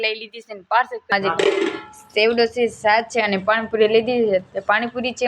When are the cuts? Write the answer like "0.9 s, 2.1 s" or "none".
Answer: 1.1 s

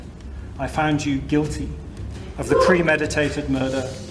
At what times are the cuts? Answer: none

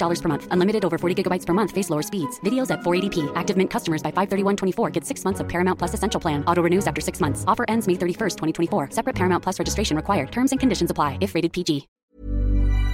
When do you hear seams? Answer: 12.0 s

